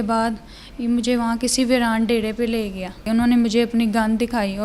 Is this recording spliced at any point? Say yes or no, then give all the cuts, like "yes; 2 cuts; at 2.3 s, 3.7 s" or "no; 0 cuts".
yes; 1 cut; at 3.0 s